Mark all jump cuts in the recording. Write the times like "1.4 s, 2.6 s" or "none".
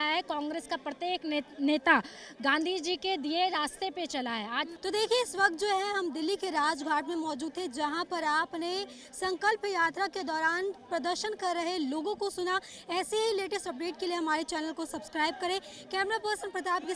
none